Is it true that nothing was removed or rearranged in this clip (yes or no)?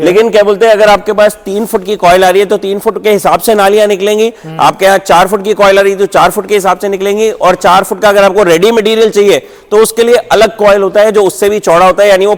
yes